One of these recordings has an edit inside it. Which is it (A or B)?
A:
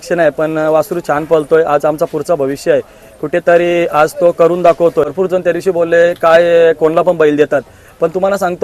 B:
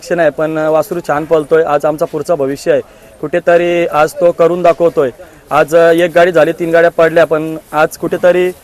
A